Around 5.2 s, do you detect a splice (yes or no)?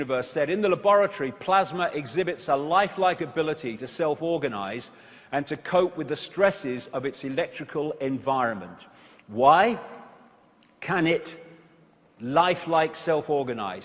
no